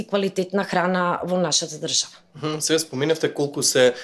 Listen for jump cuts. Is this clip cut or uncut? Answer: uncut